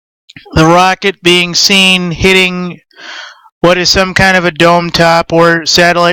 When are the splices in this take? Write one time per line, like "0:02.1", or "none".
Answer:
0:02.5